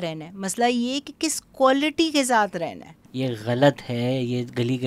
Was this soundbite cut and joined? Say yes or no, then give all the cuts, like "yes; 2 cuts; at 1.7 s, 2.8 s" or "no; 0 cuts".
yes; 1 cut; at 3.0 s